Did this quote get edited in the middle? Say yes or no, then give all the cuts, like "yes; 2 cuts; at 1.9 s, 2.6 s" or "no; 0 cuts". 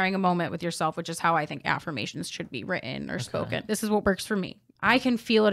yes; 2 cuts; at 3.6 s, 4.6 s